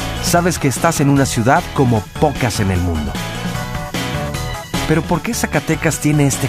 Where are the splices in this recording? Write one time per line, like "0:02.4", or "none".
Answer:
0:03.2